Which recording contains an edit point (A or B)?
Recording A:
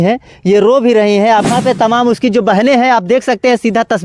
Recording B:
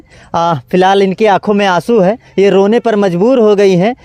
A